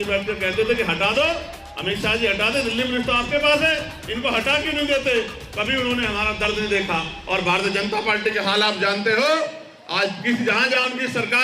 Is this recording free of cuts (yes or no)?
yes